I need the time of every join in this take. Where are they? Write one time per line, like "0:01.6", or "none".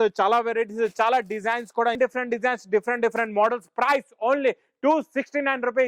0:02.0